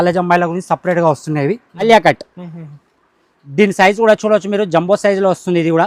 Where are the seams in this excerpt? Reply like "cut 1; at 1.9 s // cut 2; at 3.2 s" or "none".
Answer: cut 1; at 1.8 s